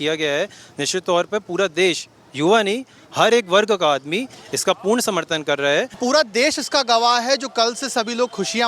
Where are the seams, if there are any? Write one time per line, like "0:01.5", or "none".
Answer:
0:06.0